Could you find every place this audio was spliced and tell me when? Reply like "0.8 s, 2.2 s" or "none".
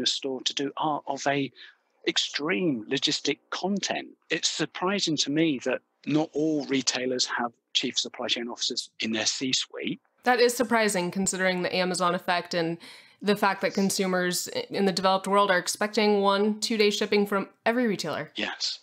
10.1 s